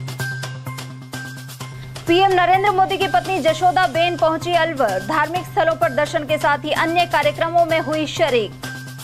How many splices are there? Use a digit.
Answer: 1